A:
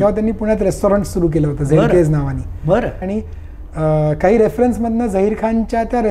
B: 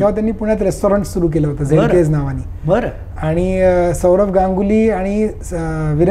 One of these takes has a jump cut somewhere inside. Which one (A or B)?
A